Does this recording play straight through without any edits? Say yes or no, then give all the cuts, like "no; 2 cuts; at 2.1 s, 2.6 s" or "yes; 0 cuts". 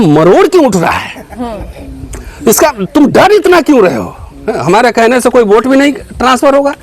yes; 0 cuts